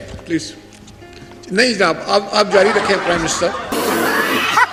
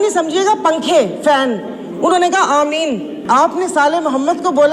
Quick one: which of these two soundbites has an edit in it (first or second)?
second